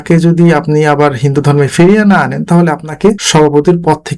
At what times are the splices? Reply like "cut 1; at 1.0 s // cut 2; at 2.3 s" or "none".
cut 1; at 3.2 s

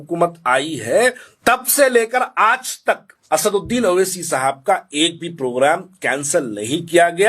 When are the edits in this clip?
cut 1; at 1.3 s // cut 2; at 3.1 s

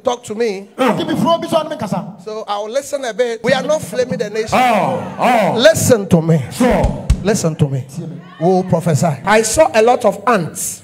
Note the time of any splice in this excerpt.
cut 1; at 3.4 s // cut 2; at 9.2 s

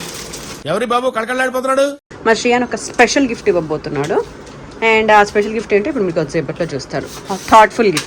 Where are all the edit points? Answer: cut 1; at 2.0 s

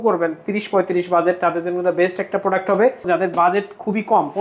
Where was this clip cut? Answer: cut 1; at 3.1 s

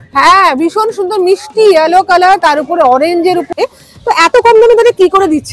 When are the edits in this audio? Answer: cut 1; at 3.6 s

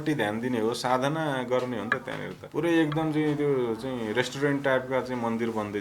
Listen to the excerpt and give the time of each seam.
cut 1; at 2.4 s

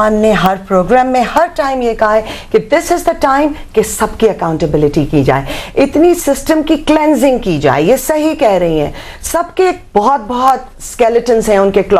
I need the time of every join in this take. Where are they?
none

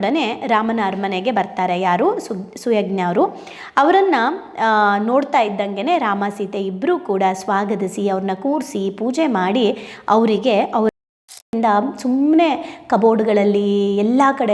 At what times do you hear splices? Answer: cut 1; at 11.1 s

